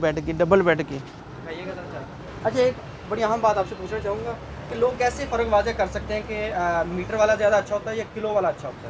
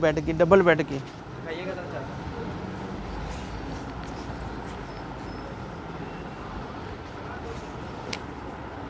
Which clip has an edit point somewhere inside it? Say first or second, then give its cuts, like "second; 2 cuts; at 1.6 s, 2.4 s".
first; 1 cut; at 2.2 s